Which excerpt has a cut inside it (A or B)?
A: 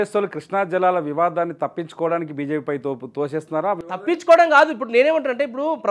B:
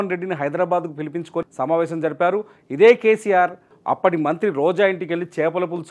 B